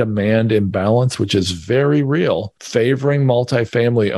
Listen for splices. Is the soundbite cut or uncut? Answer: cut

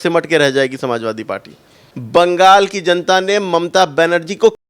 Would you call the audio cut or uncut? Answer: cut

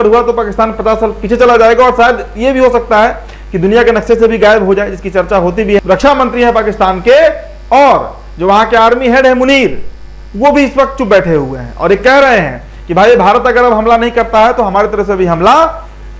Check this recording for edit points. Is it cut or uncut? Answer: uncut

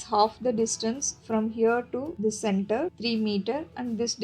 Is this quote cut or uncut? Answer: cut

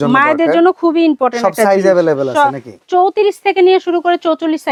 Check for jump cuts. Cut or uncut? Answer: uncut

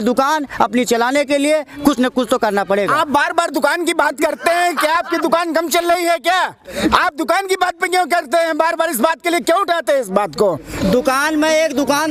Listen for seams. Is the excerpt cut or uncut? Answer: uncut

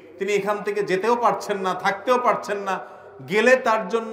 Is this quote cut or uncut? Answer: uncut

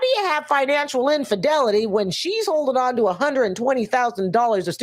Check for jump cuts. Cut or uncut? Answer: uncut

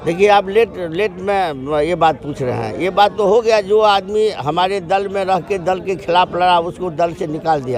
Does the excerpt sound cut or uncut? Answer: uncut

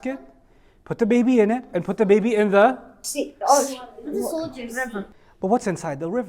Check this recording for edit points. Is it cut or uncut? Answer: cut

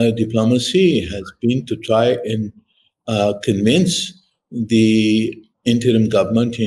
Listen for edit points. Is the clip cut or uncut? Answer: uncut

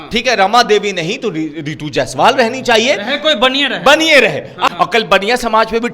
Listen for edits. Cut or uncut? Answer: cut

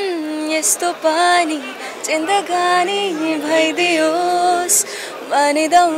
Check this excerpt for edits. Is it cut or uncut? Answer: uncut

